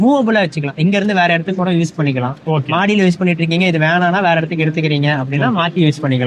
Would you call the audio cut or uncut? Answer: uncut